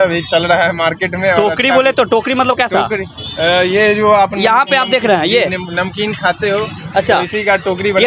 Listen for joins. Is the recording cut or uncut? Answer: uncut